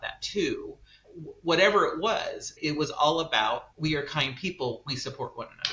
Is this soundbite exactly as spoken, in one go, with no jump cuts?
no; 3 cuts; at 1.1 s, 2.6 s, 3.7 s

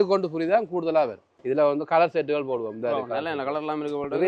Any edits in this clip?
yes; 1 cut; at 1.3 s

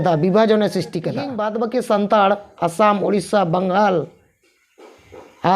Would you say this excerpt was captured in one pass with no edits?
no; 1 cut; at 1.4 s

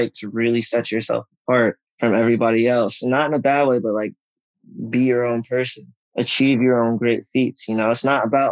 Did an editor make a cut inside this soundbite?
no; 0 cuts

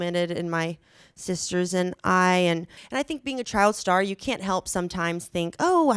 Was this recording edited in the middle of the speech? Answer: yes; 1 cut; at 2.8 s

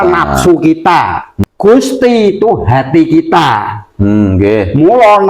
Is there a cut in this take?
yes; 1 cut; at 1.4 s

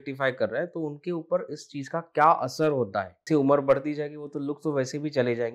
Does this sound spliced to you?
yes; 1 cut; at 3.2 s

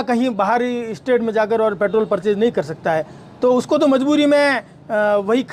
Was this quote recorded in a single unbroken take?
yes; 0 cuts

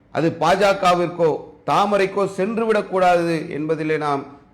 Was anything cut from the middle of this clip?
no; 0 cuts

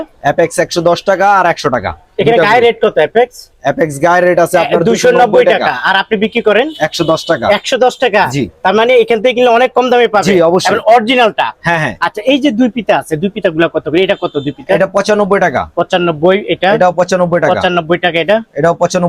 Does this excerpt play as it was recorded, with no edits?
yes; 0 cuts

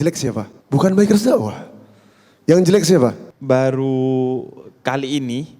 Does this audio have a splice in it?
yes; 1 cut; at 3.2 s

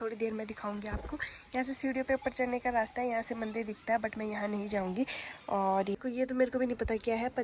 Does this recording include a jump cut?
yes; 1 cut; at 5.9 s

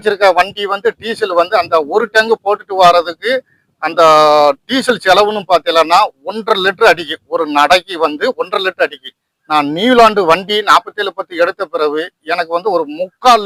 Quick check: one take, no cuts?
yes; 0 cuts

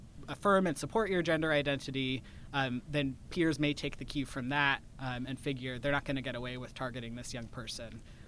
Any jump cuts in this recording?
no; 0 cuts

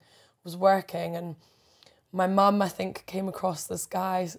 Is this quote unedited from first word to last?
yes; 0 cuts

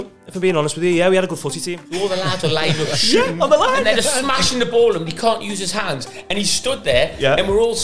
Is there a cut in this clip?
yes; 1 cut; at 1.8 s

